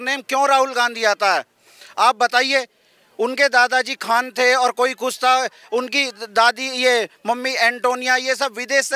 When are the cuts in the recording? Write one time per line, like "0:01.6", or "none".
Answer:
none

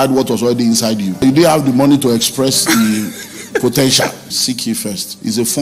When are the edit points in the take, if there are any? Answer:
0:01.2
0:04.5

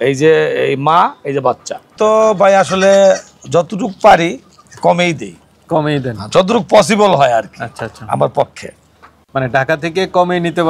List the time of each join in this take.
0:01.9

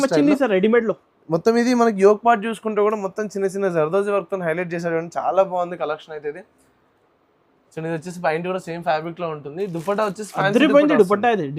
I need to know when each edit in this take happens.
none

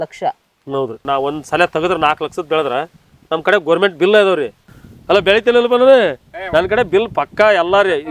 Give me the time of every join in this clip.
0:01.0

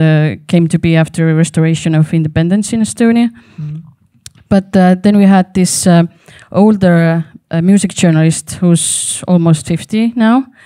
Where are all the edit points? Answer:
none

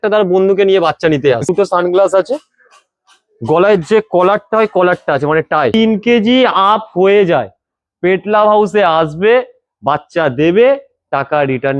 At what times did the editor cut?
0:01.5
0:05.7

